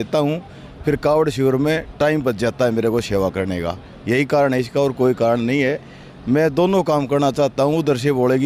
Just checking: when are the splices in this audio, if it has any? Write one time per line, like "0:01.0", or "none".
none